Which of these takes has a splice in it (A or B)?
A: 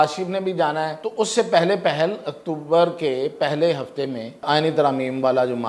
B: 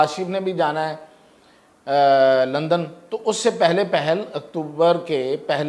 A